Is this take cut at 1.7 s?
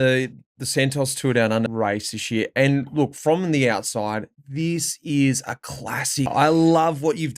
yes; 2 cuts; at 1.7 s, 6.3 s

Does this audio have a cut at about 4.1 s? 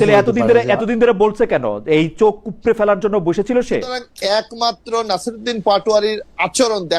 yes; 1 cut; at 4.1 s

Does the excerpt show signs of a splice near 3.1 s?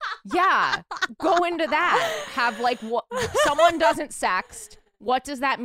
no; 0 cuts

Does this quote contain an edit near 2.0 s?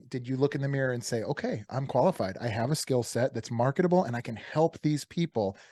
no; 0 cuts

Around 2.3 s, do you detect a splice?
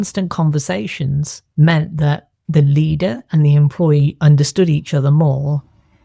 yes; 2 cuts; at 1.4 s, 2.3 s

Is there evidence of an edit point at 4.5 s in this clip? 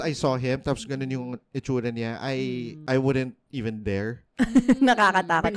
no; 1 cut; at 2.7 s

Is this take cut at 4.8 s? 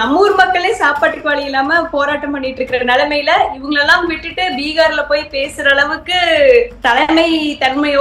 no; 1 cut; at 6.7 s

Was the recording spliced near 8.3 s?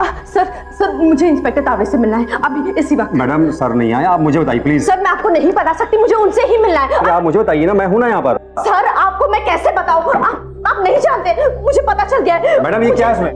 yes; 1 cut; at 8.3 s

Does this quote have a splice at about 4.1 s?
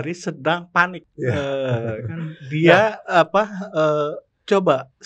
no; 1 cut; at 1.0 s

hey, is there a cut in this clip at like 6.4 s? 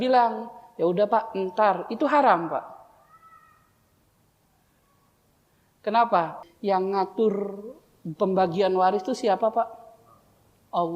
yes; 1 cut; at 6.4 s

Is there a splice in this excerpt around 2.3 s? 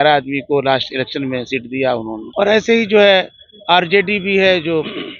no; 0 cuts

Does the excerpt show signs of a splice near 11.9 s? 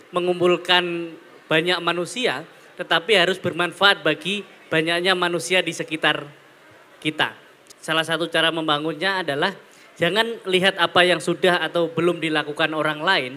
no; 1 cut; at 7.5 s

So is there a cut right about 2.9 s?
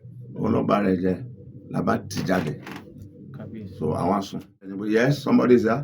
no; 1 cut; at 4.8 s

